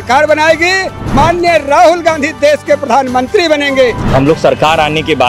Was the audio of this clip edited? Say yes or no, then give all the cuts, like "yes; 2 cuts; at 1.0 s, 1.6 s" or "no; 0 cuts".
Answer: yes; 2 cuts; at 1.1 s, 4.0 s